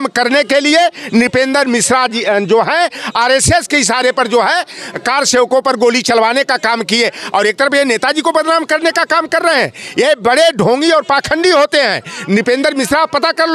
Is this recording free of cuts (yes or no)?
yes